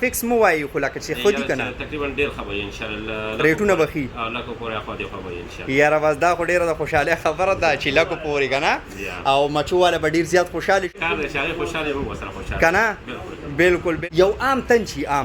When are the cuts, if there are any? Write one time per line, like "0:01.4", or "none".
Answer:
0:10.9
0:14.0